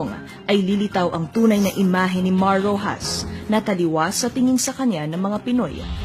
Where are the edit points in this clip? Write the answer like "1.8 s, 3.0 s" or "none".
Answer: 5.0 s

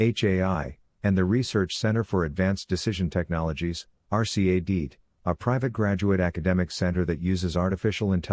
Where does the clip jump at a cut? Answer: 1.4 s

